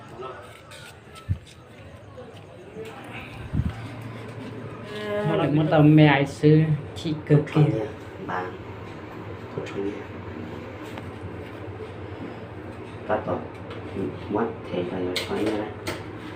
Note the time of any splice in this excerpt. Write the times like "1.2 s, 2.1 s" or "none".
5.3 s